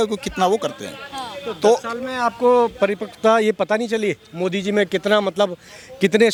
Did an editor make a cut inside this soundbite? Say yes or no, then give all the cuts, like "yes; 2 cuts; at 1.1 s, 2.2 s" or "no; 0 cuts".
no; 0 cuts